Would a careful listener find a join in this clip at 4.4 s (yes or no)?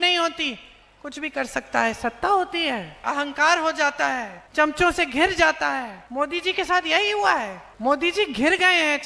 yes